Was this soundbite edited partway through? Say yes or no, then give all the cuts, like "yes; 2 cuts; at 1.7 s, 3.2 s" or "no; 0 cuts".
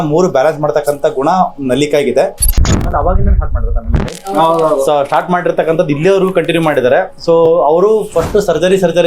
yes; 1 cut; at 2.5 s